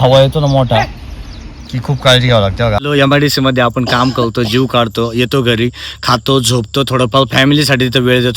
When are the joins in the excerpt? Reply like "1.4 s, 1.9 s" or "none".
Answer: 2.9 s

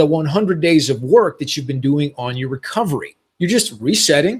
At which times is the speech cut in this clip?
3.2 s

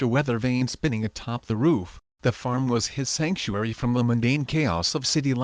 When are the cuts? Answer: 1.0 s, 3.9 s

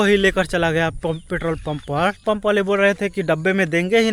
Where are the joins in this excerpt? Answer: 2.2 s

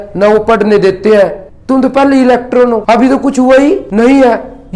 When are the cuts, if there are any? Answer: 1.4 s, 2.8 s, 3.9 s

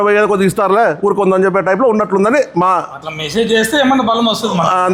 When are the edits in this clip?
none

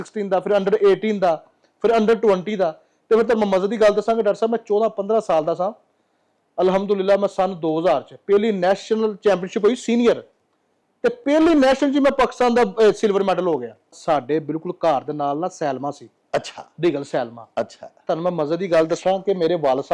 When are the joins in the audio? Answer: 14.0 s

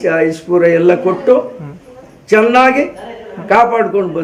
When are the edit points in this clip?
none

